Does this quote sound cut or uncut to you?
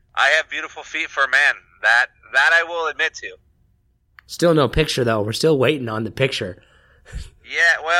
uncut